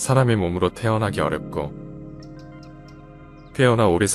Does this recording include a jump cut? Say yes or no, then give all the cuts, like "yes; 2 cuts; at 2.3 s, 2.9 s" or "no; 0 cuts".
no; 0 cuts